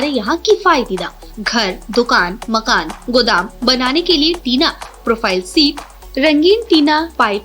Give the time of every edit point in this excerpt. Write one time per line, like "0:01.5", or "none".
none